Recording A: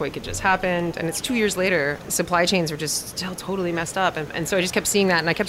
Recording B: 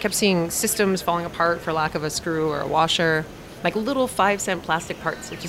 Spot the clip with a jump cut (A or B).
A